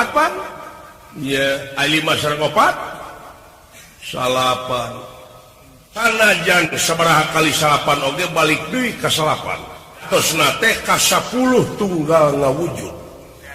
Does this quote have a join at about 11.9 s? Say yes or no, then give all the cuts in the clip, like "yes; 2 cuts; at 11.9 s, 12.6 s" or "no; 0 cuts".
no; 2 cuts; at 6.0 s, 10.1 s